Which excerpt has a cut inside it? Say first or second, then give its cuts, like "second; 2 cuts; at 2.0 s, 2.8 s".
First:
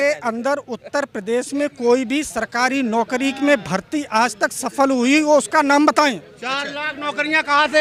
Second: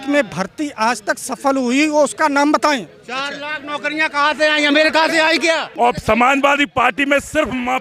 second; 1 cut; at 5.7 s